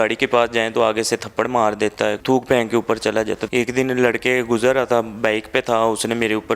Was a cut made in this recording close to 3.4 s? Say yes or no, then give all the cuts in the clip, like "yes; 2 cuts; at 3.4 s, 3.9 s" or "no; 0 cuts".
yes; 2 cuts; at 2.2 s, 3.4 s